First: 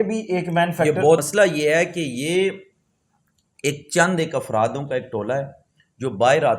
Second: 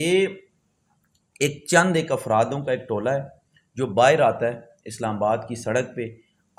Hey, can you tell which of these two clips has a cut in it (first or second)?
first